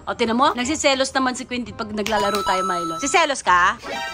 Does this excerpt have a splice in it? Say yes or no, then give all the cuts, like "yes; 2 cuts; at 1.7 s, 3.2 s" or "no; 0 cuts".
yes; 1 cut; at 2.9 s